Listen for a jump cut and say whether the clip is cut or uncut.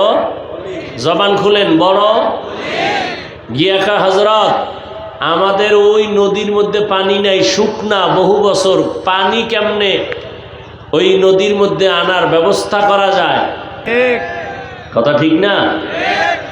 cut